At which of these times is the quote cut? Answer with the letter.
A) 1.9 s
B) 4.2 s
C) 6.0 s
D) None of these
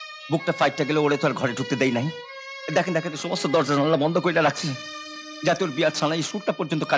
D